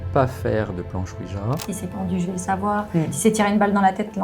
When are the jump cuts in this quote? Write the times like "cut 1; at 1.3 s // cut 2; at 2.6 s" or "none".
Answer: cut 1; at 1.7 s